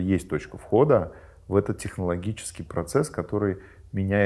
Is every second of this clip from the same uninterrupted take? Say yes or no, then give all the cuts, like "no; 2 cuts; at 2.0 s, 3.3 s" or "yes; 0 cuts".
yes; 0 cuts